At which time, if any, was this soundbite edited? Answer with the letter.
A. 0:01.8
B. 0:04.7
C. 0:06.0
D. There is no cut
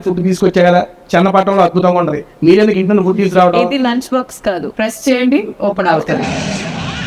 B